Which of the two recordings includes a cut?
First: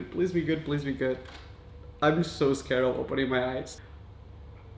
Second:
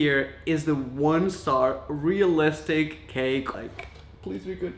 second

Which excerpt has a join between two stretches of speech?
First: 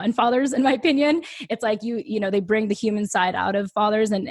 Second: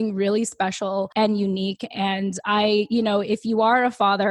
second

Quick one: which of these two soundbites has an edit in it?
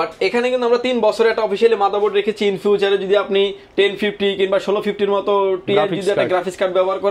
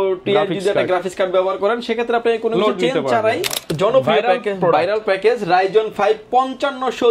second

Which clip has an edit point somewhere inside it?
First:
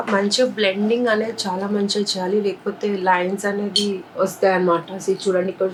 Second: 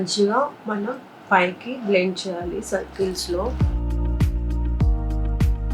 second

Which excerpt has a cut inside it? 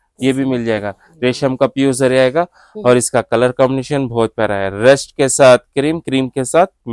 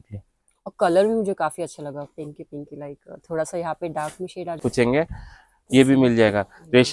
second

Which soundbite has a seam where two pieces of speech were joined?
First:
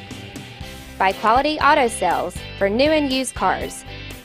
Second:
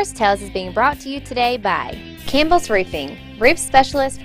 second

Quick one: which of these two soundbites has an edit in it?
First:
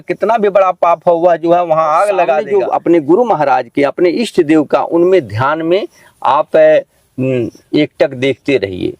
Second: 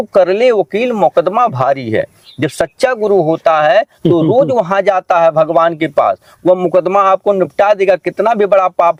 first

